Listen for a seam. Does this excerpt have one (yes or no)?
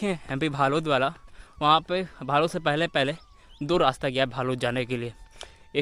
no